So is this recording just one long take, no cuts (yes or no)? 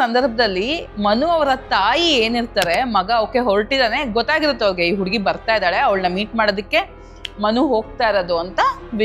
yes